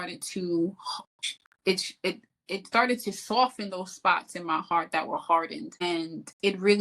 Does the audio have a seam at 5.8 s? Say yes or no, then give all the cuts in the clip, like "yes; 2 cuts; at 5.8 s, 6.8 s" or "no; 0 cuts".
yes; 1 cut; at 5.8 s